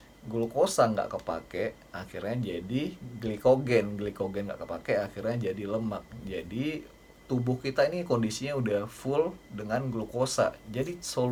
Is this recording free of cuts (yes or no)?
yes